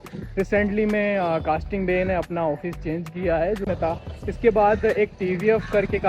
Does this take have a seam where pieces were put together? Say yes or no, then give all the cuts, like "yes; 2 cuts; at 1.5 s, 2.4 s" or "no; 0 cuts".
yes; 1 cut; at 3.6 s